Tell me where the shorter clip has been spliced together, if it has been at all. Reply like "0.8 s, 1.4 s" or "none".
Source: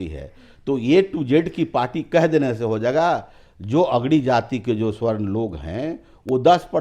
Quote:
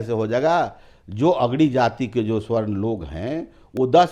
none